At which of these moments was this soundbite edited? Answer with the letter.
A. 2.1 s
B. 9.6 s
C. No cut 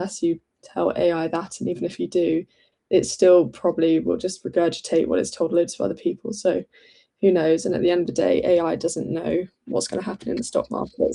C